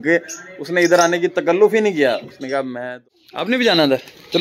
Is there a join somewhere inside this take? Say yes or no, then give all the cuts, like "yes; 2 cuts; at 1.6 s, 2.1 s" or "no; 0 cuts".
yes; 1 cut; at 3.0 s